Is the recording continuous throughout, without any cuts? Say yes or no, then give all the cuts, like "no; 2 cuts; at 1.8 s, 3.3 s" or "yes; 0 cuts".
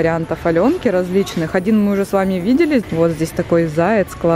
no; 1 cut; at 2.9 s